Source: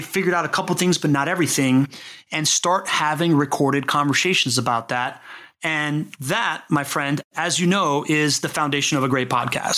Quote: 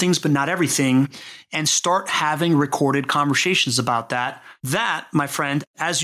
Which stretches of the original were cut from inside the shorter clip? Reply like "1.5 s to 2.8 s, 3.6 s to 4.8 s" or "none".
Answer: 5.4 s to 6.1 s